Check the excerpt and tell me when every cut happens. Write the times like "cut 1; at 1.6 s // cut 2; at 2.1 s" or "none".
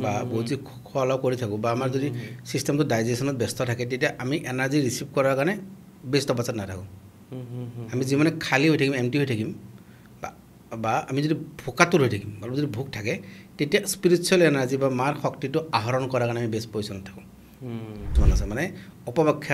cut 1; at 18.2 s